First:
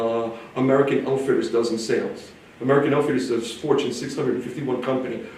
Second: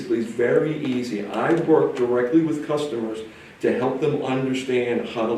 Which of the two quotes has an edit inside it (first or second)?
second